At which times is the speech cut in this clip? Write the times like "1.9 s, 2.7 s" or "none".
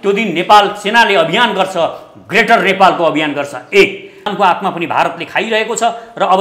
4.3 s